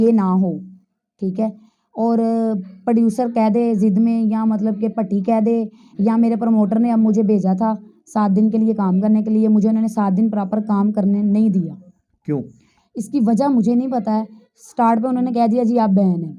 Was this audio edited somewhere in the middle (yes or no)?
no